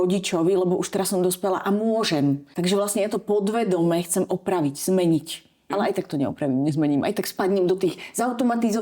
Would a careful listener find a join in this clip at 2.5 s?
yes; 2 cuts; at 2.5 s, 5.7 s

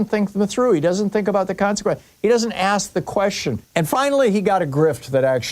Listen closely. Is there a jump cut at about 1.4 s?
no; 1 cut; at 3.6 s

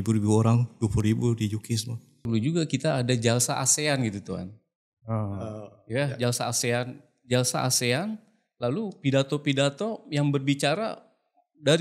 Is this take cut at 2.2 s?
yes; 1 cut; at 2.2 s

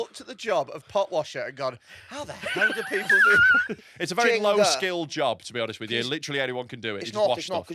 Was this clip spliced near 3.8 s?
yes; 1 cut; at 3.8 s

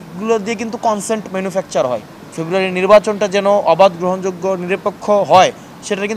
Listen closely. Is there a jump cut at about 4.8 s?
no; 1 cut; at 2.2 s

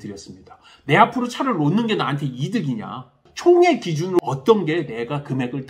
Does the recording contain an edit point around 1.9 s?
no; 2 cuts; at 3.2 s, 4.2 s

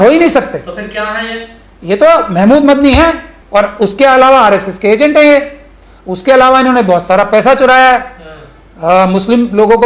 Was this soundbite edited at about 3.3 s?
yes; 1 cut; at 3.3 s

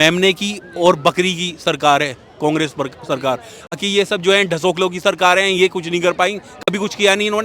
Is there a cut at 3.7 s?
yes; 1 cut; at 3.7 s

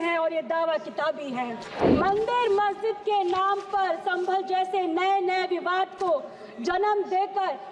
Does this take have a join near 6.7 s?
no; 1 cut; at 1.7 s

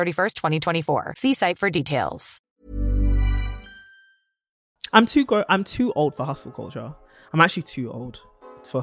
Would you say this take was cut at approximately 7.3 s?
no; 1 cut; at 4.7 s

